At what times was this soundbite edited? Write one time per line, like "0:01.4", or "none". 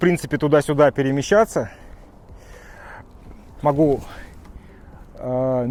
none